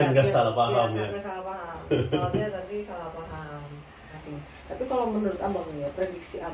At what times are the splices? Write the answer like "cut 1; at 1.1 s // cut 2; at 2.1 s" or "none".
cut 1; at 4.1 s